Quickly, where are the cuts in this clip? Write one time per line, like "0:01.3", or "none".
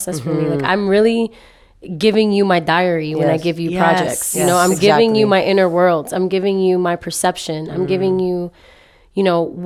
none